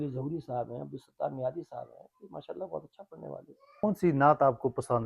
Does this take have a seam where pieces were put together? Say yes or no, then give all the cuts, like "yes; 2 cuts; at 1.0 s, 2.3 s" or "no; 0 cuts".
yes; 1 cut; at 3.8 s